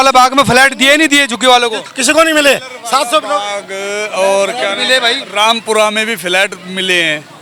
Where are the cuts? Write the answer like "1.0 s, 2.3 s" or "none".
none